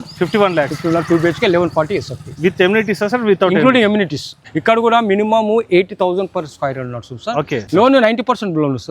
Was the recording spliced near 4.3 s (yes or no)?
yes